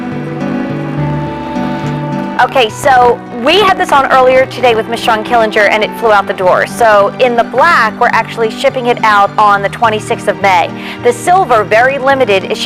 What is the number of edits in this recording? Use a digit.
0